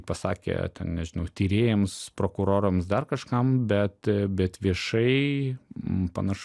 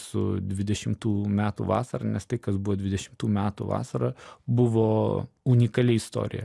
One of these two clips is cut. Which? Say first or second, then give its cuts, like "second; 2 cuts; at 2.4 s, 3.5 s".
second; 2 cuts; at 4.3 s, 5.3 s